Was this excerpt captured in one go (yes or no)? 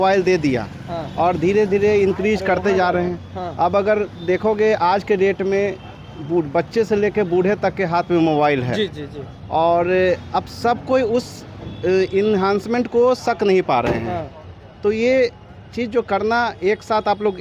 yes